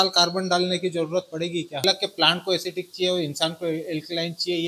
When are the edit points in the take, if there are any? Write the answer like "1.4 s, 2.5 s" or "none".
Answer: 1.8 s